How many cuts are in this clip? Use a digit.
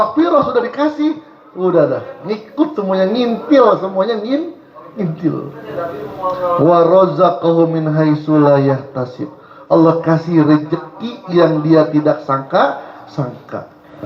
0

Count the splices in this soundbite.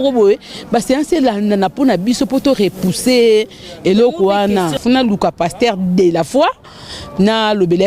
1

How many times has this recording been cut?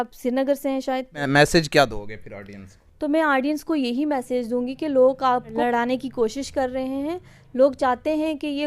2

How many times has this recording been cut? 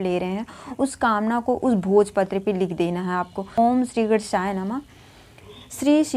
1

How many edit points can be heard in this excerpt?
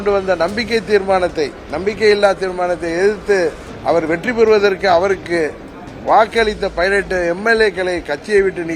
1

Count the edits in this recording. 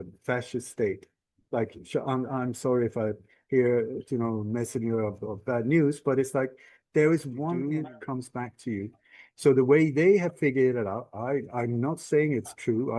1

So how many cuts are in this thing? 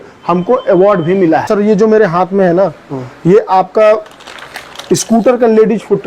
1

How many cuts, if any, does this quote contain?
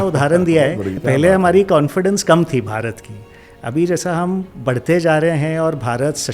1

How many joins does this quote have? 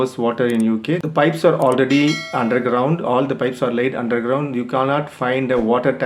1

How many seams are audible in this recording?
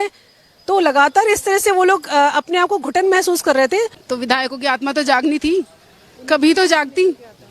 1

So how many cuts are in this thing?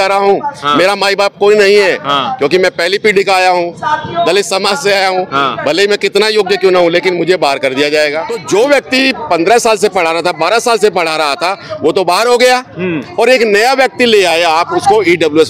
1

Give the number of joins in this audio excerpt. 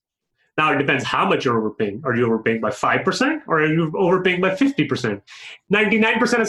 1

